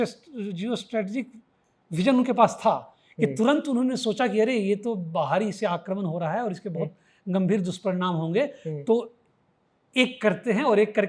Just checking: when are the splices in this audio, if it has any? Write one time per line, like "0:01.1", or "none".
none

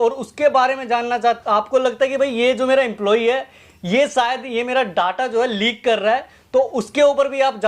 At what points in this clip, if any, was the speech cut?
0:01.4

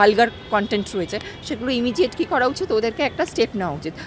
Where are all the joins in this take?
none

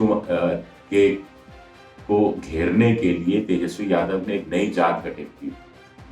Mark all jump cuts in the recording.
none

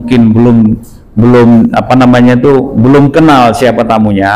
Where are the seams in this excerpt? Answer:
none

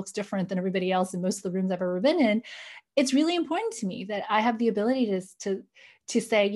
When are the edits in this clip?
none

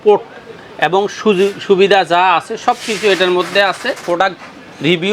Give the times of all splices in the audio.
0:04.0

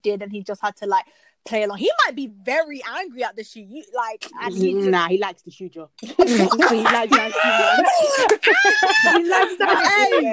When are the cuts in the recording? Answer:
none

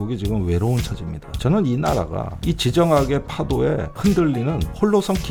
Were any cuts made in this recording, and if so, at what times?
none

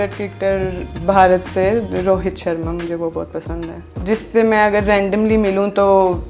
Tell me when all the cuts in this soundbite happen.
0:04.0

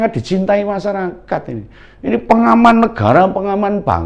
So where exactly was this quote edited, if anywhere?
none

